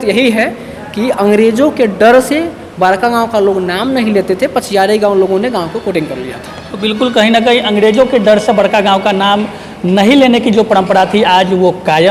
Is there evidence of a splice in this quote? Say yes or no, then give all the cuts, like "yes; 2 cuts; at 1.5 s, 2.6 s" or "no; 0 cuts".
no; 0 cuts